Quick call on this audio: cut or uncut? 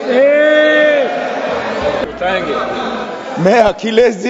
cut